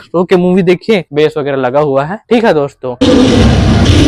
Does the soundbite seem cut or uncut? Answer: cut